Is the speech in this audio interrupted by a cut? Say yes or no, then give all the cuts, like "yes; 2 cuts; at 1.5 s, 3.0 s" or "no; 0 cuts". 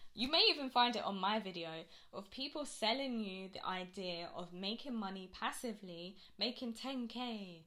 no; 0 cuts